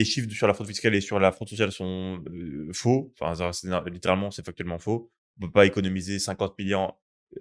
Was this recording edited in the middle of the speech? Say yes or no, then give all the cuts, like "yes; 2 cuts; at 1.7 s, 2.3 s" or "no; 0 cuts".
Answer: no; 0 cuts